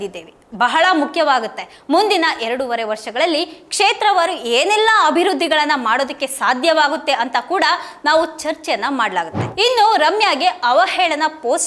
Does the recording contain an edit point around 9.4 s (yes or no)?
yes